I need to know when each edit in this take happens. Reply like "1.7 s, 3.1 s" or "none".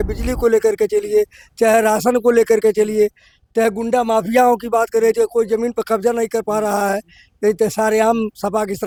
none

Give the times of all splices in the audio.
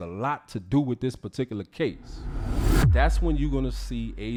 none

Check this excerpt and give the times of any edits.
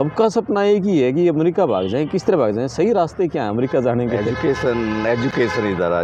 none

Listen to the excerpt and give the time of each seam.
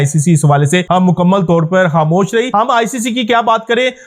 0.8 s, 2.5 s

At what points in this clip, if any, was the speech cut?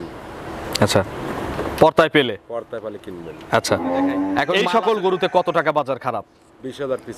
4.5 s

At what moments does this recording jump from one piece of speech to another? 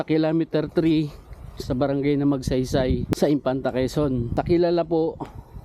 3.1 s, 4.3 s

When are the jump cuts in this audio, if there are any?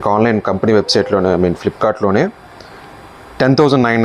none

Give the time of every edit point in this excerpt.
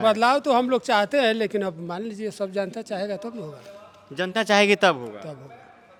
none

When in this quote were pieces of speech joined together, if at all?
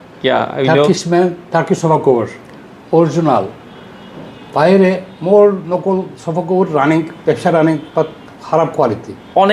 none

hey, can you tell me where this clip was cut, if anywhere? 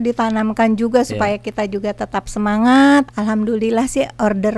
3.1 s

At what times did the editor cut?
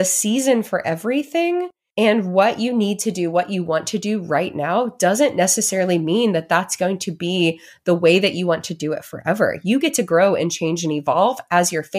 1.8 s

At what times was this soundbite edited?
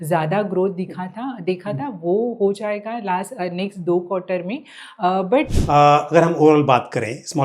5.6 s

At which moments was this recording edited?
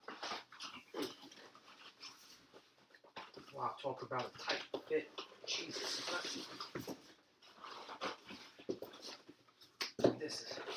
none

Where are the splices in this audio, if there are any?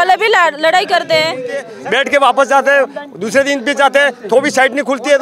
1.7 s

